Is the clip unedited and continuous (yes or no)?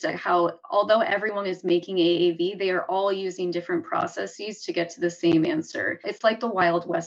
no